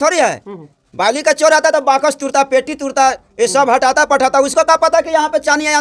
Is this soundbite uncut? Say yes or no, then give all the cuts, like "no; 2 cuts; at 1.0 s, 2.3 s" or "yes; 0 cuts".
yes; 0 cuts